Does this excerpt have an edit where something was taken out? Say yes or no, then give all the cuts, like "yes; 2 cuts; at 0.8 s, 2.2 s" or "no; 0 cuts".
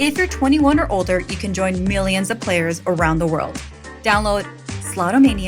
yes; 1 cut; at 4.5 s